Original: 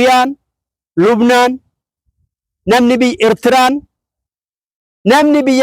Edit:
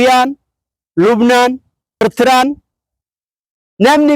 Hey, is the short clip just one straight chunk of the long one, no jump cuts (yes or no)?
no